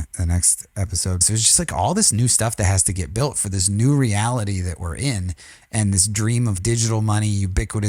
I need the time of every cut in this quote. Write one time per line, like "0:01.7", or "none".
0:01.2
0:06.6